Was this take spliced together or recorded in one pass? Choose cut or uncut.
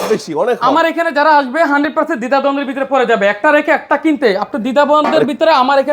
uncut